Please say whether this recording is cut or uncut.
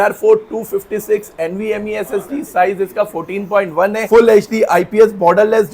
uncut